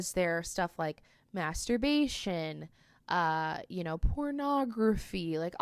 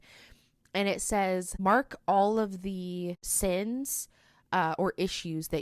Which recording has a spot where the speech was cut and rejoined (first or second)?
second